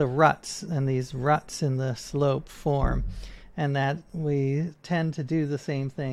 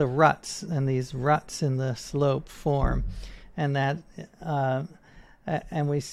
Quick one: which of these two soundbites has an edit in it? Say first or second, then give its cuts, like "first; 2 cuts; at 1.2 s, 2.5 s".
first; 1 cut; at 4.1 s